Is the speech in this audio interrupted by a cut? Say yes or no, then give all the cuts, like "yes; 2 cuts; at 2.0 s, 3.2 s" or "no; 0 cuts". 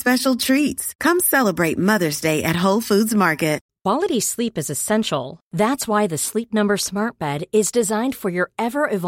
yes; 1 cut; at 3.7 s